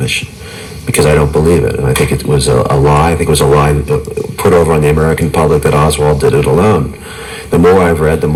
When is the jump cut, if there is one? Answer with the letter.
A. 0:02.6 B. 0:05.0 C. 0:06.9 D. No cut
D